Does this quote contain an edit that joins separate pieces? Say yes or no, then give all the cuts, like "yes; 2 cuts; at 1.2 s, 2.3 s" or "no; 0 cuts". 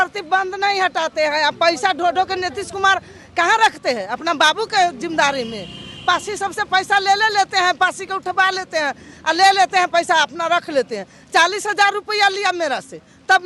no; 0 cuts